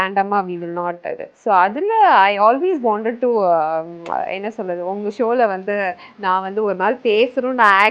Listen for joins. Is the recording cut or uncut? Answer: uncut